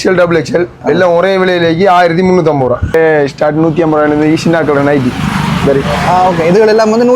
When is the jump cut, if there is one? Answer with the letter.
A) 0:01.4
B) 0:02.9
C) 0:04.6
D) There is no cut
B